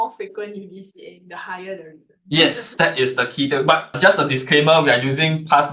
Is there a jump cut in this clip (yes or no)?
yes